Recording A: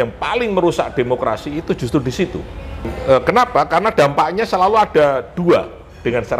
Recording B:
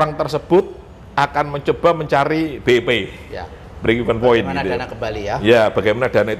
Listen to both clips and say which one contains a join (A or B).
A